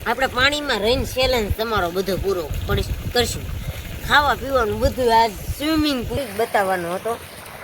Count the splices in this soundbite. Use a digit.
1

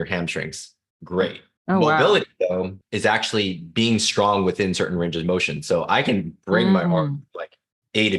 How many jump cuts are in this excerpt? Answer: 2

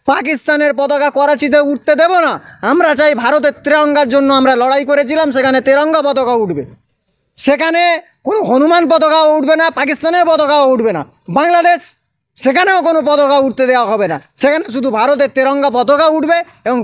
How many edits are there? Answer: 0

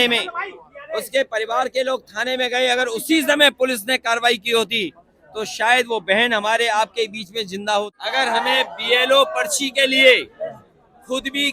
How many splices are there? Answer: 1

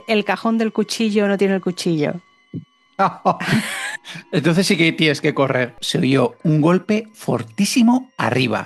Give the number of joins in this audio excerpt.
1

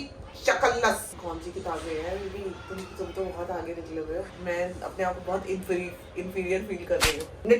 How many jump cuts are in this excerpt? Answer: 0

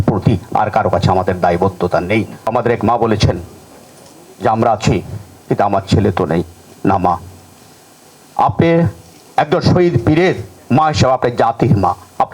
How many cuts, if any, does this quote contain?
1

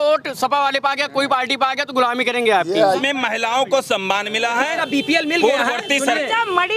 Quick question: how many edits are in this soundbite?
1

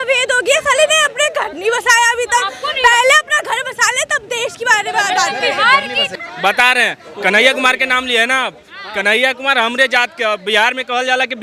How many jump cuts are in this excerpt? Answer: 1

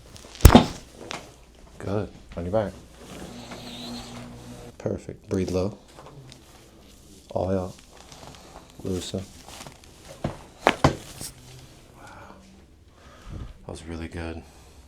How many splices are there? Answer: 1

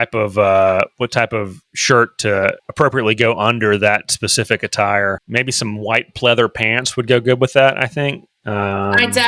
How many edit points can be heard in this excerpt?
2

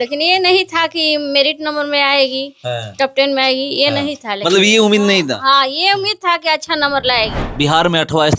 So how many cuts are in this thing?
1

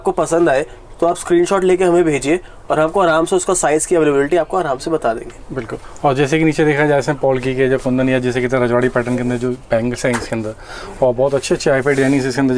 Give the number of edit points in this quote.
0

